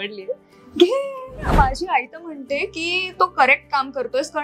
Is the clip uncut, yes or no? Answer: no